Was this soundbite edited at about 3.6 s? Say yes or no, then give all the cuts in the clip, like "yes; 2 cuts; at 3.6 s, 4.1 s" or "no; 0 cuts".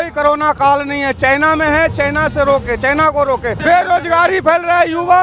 yes; 1 cut; at 3.6 s